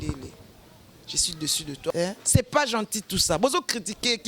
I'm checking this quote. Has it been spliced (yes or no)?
yes